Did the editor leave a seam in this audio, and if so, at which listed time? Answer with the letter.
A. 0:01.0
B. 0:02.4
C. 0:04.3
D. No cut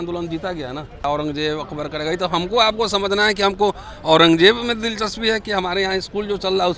A